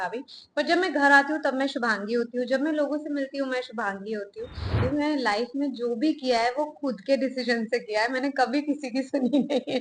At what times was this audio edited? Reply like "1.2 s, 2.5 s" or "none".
4.8 s